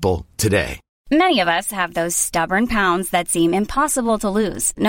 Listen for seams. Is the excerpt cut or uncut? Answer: cut